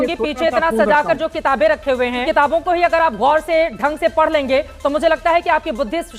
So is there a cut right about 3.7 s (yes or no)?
no